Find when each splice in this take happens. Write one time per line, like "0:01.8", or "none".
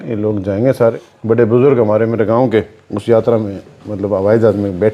0:01.0